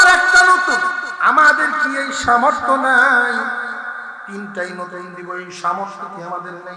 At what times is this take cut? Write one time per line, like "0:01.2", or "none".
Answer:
0:01.1

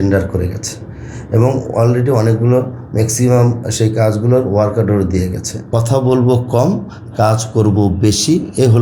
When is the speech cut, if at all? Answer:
0:05.9

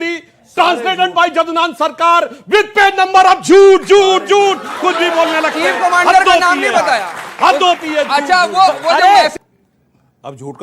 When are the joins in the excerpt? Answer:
0:09.4

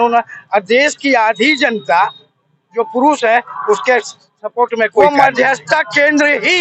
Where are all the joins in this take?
0:05.0

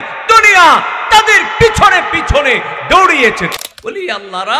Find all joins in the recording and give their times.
0:03.5

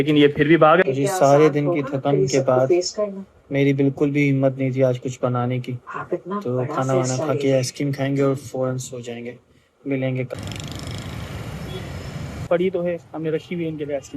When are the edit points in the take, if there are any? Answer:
0:00.8
0:10.3
0:12.5

